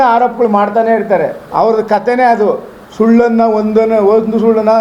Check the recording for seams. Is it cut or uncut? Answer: cut